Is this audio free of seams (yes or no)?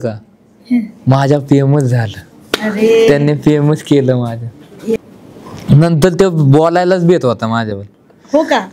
no